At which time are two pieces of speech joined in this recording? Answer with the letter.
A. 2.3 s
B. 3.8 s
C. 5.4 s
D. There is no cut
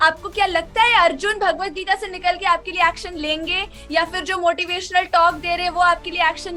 D